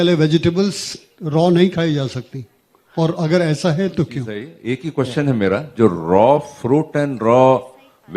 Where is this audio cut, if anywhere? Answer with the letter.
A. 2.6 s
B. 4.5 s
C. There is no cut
B